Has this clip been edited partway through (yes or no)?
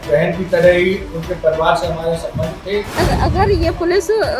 yes